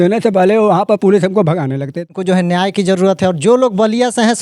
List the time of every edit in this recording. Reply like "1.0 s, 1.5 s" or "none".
2.1 s